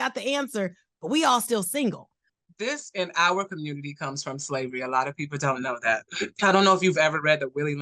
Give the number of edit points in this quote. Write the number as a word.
one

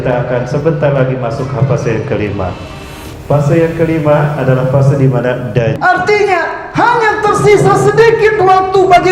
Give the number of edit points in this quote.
one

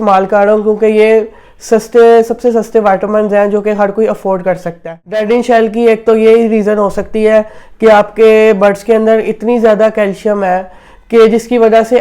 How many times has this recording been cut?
one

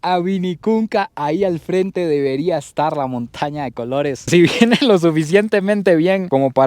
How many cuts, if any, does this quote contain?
one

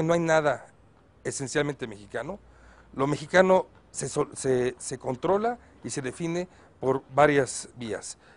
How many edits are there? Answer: zero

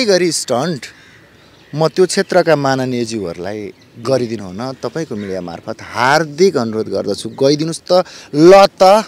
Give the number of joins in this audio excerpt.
zero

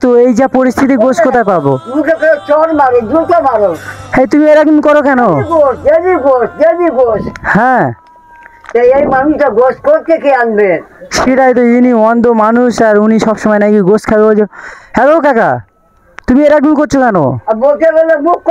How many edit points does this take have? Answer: zero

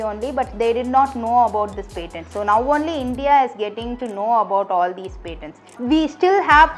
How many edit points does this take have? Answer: one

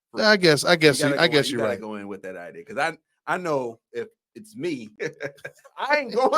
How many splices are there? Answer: one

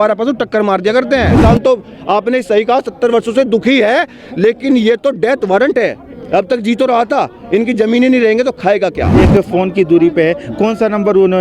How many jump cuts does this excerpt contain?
two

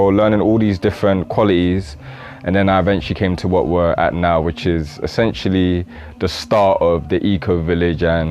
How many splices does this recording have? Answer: zero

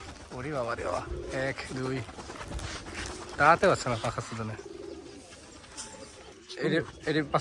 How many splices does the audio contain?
zero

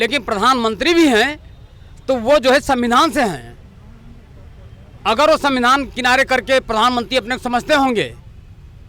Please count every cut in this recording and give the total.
zero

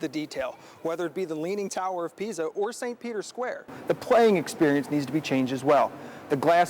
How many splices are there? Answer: one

